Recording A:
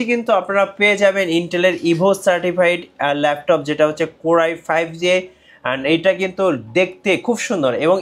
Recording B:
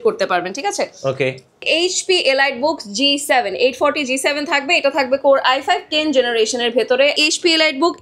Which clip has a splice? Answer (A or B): B